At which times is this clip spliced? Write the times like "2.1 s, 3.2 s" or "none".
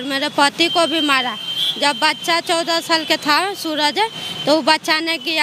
none